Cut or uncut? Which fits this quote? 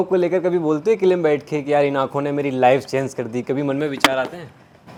uncut